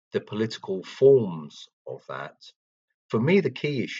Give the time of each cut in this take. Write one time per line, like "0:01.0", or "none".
0:02.9

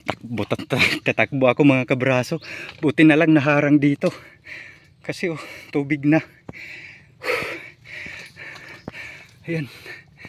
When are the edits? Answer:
none

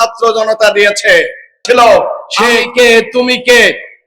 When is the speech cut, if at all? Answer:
0:01.6

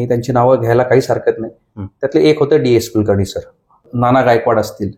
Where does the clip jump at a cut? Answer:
0:03.9

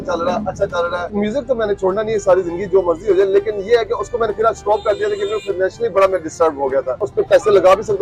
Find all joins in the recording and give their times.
0:01.1
0:07.0

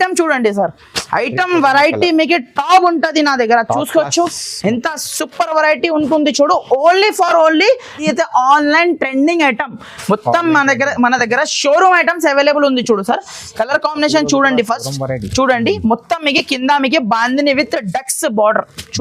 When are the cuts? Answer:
0:08.0

